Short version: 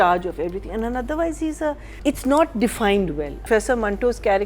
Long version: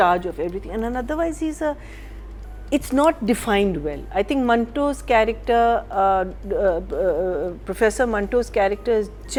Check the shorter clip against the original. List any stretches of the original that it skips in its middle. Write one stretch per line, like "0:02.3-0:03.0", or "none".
0:01.9-0:02.5
0:04.0-0:07.6

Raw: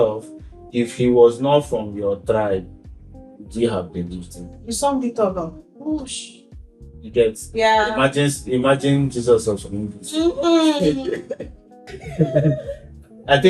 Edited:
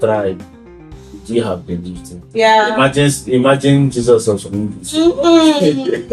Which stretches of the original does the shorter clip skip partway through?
0:04.5-0:07.4

